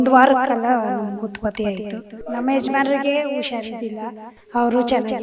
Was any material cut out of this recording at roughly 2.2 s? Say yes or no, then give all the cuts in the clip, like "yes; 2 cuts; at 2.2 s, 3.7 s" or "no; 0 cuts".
yes; 1 cut; at 2.2 s